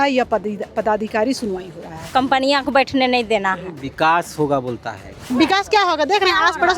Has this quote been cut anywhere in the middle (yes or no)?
yes